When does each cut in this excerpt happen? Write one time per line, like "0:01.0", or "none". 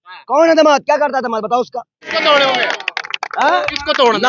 0:02.1